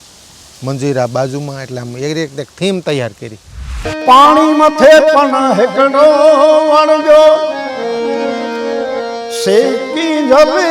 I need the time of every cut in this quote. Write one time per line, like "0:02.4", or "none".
0:03.9